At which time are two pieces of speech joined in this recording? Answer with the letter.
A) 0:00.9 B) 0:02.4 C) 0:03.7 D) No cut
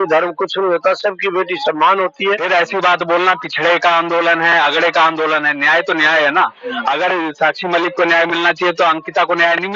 B